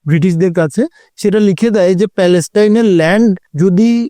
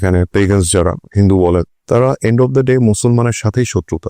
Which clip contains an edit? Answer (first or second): first